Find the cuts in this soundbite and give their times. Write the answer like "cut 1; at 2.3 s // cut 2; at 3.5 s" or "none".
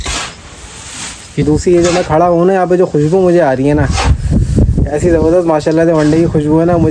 cut 1; at 1.4 s